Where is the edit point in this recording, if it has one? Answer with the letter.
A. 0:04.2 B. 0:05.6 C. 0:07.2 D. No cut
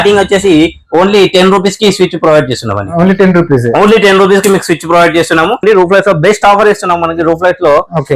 B